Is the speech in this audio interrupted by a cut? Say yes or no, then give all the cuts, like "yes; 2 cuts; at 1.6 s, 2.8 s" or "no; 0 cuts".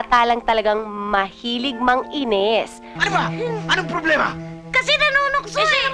yes; 1 cut; at 2.9 s